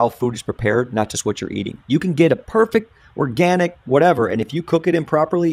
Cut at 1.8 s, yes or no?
no